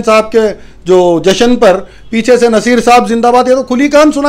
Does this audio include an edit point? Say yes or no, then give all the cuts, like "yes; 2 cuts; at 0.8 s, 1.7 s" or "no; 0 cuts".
no; 0 cuts